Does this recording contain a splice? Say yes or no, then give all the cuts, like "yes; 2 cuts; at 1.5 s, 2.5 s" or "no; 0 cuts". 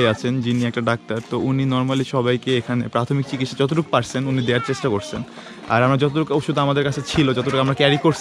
no; 0 cuts